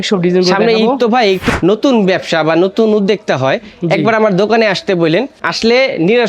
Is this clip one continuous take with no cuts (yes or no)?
no